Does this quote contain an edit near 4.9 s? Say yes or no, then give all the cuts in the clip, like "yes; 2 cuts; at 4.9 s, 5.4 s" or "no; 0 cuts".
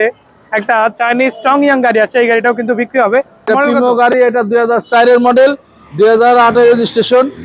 no; 1 cut; at 3.4 s